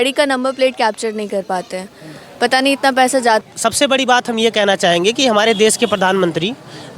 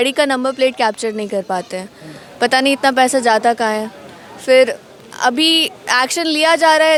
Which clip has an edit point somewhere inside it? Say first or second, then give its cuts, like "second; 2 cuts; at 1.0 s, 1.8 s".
first; 1 cut; at 3.4 s